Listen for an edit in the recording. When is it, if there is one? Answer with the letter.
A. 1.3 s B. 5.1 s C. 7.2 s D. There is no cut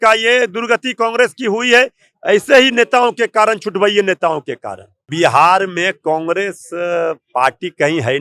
B